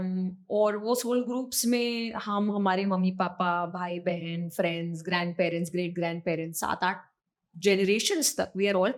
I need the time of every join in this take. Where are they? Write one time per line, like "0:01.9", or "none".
none